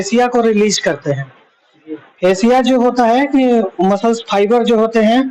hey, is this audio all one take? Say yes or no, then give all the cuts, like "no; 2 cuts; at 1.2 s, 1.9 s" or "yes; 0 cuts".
yes; 0 cuts